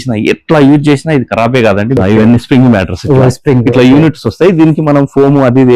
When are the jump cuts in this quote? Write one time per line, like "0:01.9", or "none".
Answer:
0:02.0